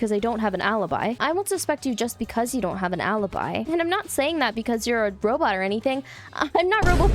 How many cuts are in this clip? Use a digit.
2